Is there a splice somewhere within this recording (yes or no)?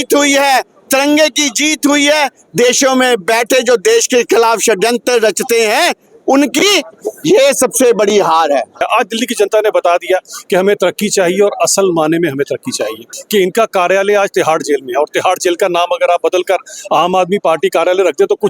yes